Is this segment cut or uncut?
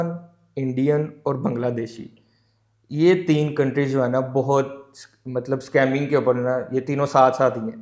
uncut